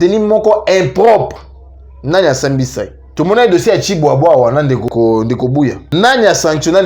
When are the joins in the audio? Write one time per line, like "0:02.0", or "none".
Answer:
0:03.0
0:04.9
0:05.8

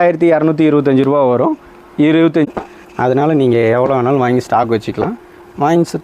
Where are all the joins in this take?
0:02.5

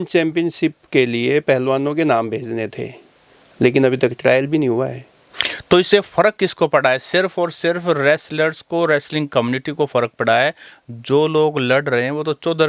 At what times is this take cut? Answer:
none

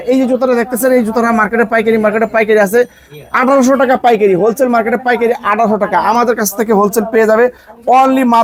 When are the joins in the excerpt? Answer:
none

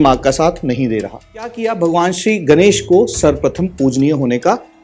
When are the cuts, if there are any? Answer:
0:01.7

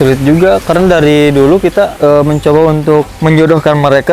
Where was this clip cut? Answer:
0:03.1

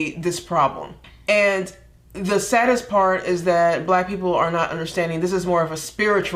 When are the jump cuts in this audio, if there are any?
0:00.9

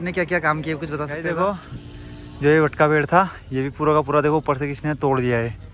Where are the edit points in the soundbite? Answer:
0:01.2

